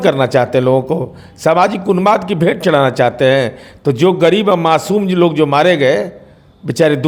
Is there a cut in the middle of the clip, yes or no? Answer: no